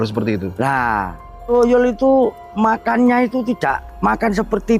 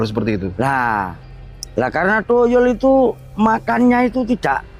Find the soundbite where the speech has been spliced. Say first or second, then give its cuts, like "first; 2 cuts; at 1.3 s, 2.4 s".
first; 2 cuts; at 1.4 s, 3.9 s